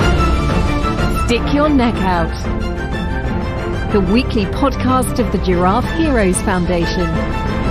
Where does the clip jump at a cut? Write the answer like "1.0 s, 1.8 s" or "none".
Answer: none